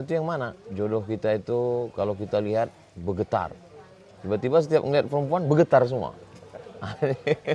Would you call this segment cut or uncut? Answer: uncut